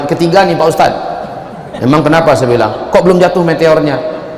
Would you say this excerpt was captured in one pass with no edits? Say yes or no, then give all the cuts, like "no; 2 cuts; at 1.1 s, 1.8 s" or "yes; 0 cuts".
yes; 0 cuts